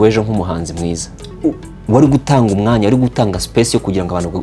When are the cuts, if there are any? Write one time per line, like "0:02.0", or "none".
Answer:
0:01.7